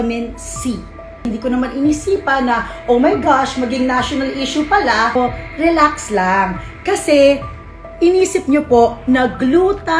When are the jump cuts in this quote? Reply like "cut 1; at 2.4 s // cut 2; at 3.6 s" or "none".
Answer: cut 1; at 1.2 s // cut 2; at 5.2 s